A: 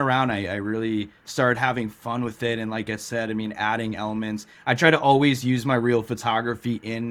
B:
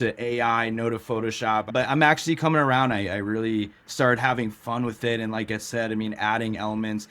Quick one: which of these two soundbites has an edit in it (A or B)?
B